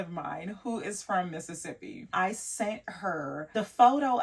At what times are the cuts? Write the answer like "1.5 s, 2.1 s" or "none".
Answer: 2.1 s